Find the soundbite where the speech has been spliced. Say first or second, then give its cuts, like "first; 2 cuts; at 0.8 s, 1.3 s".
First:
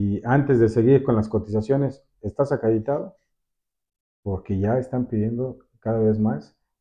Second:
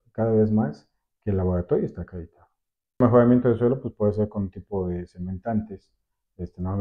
second; 1 cut; at 3.0 s